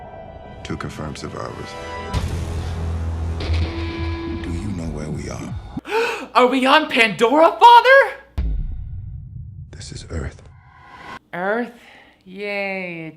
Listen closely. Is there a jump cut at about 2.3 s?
yes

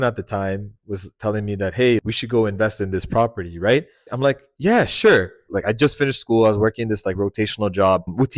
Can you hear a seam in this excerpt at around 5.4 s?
yes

